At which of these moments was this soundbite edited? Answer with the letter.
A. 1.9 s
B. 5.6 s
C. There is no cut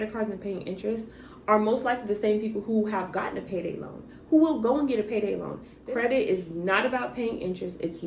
B